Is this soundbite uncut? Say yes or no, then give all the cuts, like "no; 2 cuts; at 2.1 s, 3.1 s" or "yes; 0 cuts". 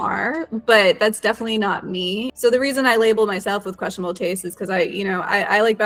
yes; 0 cuts